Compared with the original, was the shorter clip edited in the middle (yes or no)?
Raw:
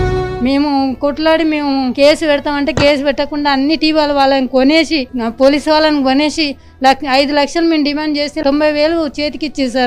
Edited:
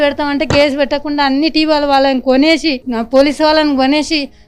no